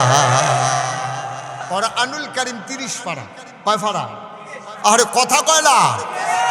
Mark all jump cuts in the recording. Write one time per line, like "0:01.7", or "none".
0:01.7